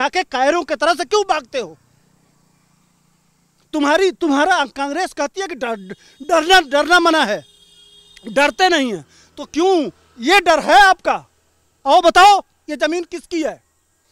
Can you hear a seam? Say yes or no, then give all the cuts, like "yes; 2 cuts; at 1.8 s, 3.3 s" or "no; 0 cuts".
no; 0 cuts